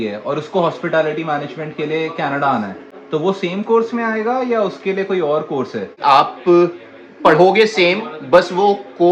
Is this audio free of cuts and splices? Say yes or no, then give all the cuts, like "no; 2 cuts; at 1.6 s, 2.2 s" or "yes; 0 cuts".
yes; 0 cuts